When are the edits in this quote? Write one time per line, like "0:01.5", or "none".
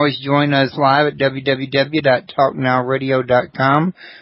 0:02.9